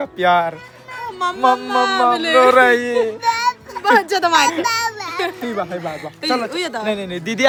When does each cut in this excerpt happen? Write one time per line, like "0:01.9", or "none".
none